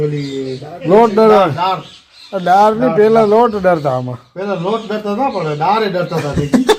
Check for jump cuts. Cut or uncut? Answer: uncut